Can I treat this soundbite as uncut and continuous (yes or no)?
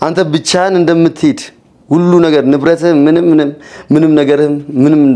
yes